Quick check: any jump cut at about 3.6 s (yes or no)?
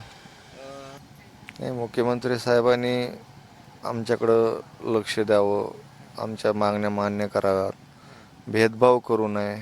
no